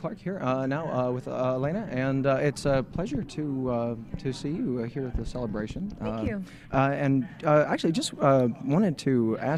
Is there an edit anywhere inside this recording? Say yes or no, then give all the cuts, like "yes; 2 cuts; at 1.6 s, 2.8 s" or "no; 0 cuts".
no; 0 cuts